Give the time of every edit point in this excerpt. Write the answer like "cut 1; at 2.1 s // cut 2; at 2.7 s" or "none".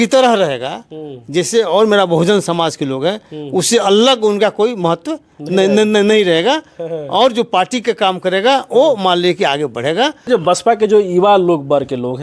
cut 1; at 10.3 s